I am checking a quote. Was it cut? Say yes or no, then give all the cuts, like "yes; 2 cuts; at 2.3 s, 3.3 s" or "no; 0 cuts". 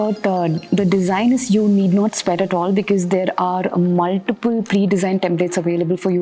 no; 0 cuts